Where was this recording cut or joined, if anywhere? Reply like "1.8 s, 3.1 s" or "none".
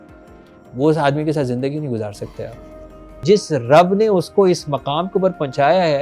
3.2 s